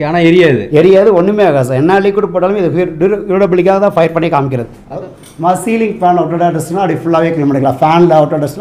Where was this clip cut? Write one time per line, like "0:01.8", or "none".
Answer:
0:05.0